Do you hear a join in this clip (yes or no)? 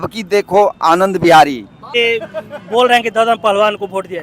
yes